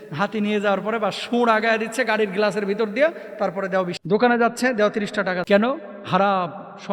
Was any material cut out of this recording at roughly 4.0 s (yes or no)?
yes